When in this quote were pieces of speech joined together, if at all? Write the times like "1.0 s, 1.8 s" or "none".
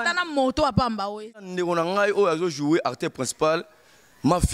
1.4 s